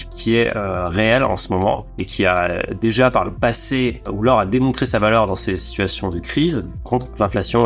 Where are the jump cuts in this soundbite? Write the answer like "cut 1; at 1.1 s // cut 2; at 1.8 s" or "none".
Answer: none